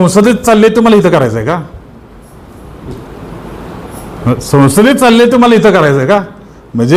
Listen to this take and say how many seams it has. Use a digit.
0